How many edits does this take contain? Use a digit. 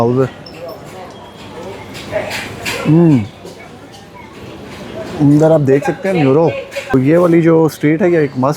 1